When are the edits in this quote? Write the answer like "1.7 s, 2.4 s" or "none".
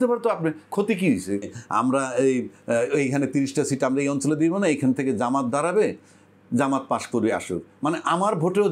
1.5 s